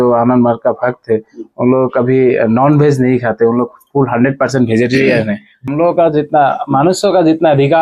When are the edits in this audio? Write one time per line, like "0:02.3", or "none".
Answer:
0:05.5